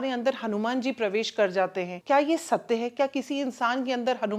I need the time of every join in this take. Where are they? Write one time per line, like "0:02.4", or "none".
0:01.9